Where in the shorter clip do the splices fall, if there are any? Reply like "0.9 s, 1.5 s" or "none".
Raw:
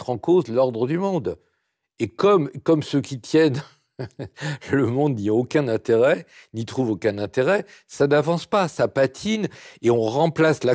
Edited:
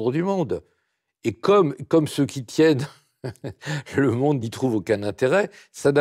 4.4 s